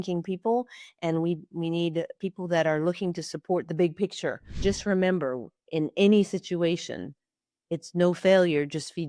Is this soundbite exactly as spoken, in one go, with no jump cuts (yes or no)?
no